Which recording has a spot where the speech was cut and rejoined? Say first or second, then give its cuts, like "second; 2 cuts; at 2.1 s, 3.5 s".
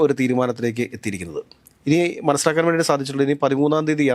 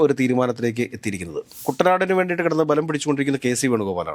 second; 1 cut; at 1.7 s